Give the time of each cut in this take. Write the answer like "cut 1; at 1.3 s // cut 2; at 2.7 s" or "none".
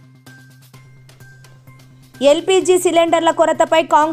cut 1; at 2.2 s